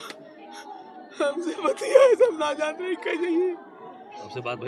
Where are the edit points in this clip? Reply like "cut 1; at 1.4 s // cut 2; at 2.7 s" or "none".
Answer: none